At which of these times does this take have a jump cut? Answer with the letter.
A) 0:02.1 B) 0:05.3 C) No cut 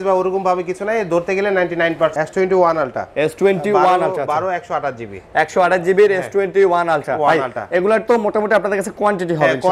A